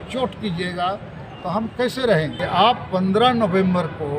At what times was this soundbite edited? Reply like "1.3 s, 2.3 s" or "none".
2.4 s